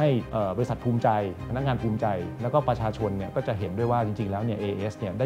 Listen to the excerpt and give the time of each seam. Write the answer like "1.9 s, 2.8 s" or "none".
none